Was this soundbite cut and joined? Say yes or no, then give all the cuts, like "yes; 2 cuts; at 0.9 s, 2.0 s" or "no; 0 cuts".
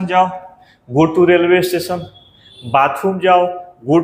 no; 0 cuts